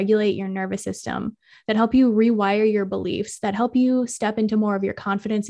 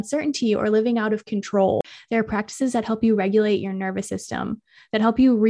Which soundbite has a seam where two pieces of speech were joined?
second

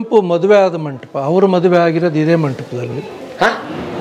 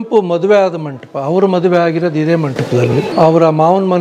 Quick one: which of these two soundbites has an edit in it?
second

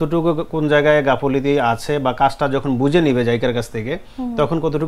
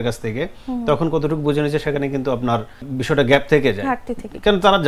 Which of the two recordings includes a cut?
second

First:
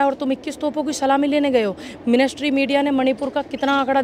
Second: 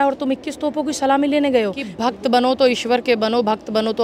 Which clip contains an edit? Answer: second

